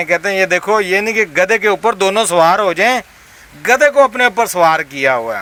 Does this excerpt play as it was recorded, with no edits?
yes; 0 cuts

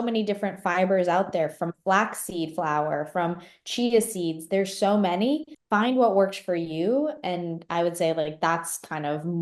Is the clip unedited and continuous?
no; 1 cut; at 5.5 s

